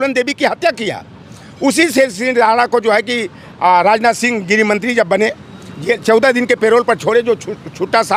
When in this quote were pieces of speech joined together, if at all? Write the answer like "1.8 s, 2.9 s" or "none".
none